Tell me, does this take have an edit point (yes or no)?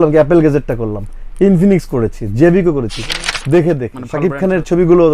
yes